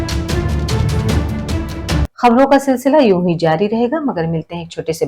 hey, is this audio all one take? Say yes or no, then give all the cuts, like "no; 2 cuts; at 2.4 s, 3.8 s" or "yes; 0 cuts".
no; 1 cut; at 2.1 s